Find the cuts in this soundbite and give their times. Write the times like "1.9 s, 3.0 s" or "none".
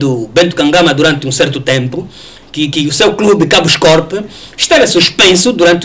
none